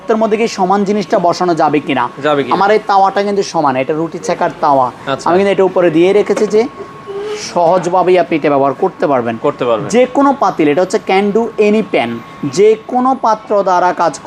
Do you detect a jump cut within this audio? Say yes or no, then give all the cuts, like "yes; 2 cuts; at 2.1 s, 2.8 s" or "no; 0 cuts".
no; 0 cuts